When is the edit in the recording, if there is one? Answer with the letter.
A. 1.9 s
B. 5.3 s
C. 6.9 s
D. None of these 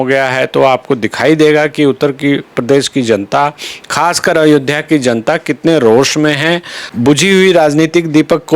C